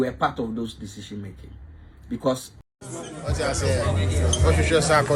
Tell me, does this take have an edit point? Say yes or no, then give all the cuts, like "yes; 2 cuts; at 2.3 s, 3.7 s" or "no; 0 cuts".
yes; 1 cut; at 2.5 s